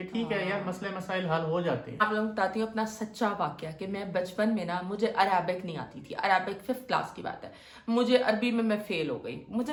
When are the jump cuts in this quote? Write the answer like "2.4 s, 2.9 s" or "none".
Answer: none